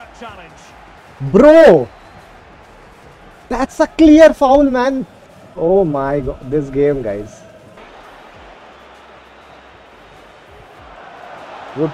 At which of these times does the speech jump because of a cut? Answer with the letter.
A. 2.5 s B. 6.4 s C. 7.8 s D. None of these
C